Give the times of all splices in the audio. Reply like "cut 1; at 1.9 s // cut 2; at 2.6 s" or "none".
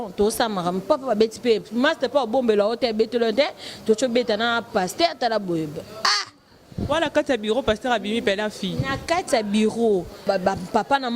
cut 1; at 10.2 s